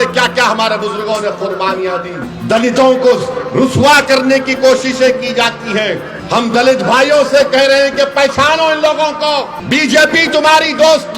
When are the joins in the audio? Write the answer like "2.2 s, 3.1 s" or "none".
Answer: 2.3 s, 6.1 s, 9.6 s